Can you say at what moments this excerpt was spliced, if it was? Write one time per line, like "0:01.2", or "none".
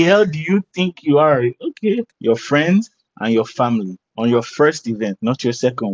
0:02.1